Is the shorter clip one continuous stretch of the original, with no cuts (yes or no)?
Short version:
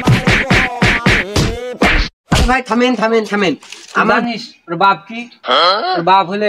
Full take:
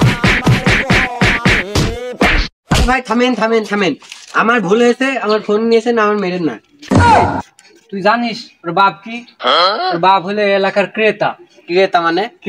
no